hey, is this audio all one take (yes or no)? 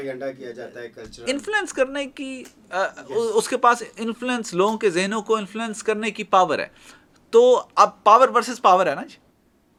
yes